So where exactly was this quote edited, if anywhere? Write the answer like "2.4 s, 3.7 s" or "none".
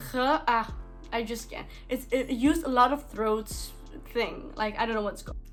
none